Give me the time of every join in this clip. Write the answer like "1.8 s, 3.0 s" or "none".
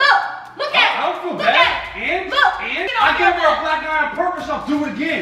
2.9 s